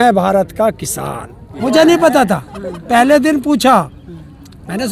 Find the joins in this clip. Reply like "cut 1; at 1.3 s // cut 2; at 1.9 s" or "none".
cut 1; at 1.5 s